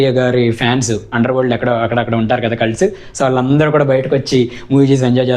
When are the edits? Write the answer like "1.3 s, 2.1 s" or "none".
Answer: none